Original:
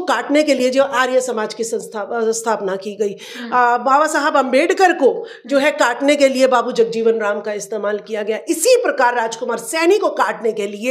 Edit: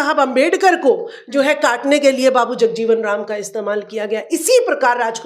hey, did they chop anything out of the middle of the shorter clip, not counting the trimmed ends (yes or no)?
no